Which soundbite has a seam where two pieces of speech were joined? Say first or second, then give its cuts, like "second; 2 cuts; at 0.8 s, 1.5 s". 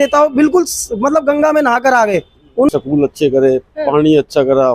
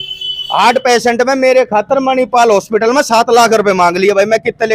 first; 1 cut; at 2.7 s